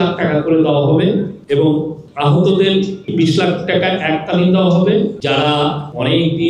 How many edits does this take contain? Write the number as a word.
four